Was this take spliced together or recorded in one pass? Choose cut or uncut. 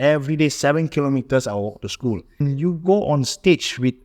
cut